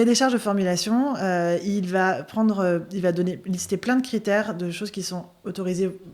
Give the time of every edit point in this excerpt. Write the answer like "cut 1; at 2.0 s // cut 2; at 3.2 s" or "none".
none

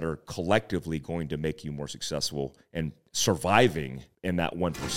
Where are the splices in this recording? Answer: cut 1; at 3.1 s // cut 2; at 4.0 s

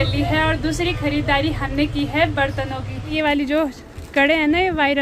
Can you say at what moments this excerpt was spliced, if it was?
cut 1; at 3.1 s

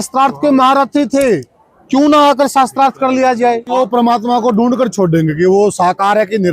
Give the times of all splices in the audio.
cut 1; at 3.7 s

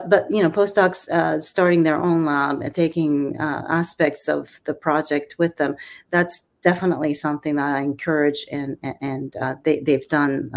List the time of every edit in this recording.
none

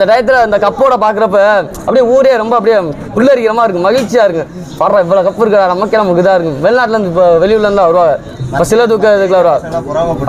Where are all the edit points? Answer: none

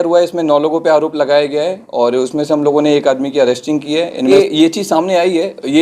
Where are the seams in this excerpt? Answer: cut 1; at 4.3 s

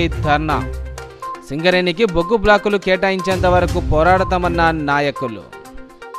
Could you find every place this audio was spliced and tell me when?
none

